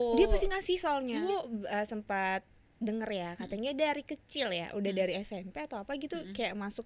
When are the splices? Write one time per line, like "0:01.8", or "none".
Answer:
0:01.2